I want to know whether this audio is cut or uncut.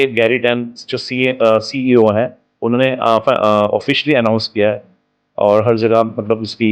uncut